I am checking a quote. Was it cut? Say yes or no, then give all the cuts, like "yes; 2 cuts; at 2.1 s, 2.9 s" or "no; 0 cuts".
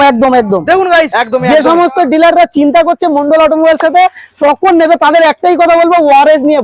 yes; 1 cut; at 1.1 s